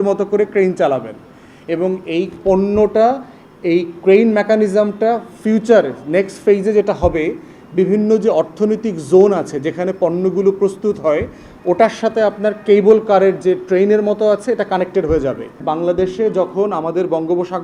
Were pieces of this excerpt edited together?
yes; 1 cut; at 15.6 s

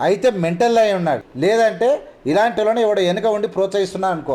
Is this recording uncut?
no; 1 cut; at 1.3 s

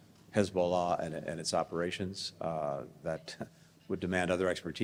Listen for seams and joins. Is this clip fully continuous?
yes; 0 cuts

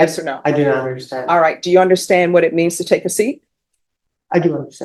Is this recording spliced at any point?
no; 0 cuts

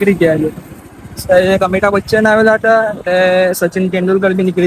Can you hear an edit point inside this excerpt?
no; 0 cuts

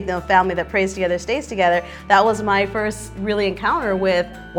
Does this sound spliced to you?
no; 0 cuts

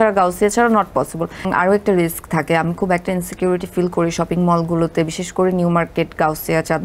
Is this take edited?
yes; 1 cut; at 1.5 s

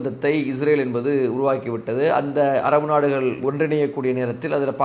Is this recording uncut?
yes; 0 cuts

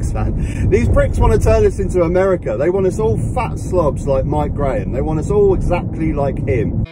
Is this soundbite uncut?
yes; 0 cuts

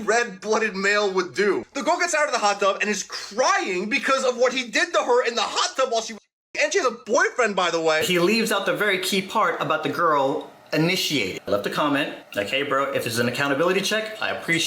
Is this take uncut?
no; 3 cuts; at 1.7 s, 8.0 s, 11.4 s

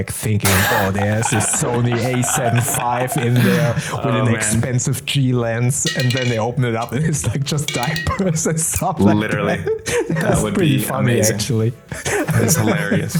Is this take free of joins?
yes; 0 cuts

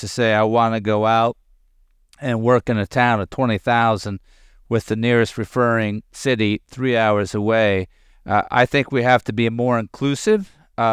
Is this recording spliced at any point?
no; 0 cuts

